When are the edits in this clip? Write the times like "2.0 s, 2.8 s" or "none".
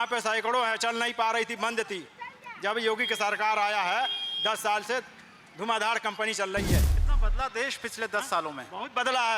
7.0 s